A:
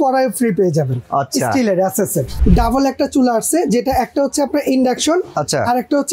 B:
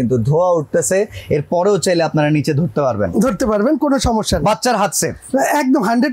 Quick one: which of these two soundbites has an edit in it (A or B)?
A